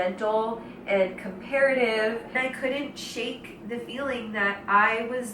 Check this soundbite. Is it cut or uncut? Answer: cut